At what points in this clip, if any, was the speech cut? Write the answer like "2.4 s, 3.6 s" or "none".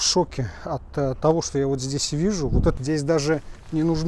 2.8 s